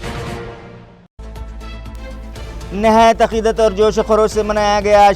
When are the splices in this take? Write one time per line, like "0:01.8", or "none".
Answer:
0:01.2
0:02.7